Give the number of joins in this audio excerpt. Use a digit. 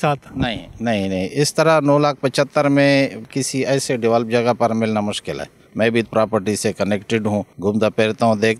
3